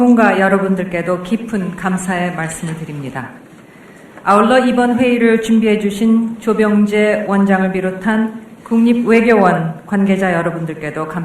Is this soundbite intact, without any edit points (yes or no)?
no